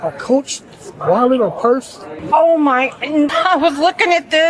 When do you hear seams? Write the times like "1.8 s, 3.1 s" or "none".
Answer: 2.1 s, 3.3 s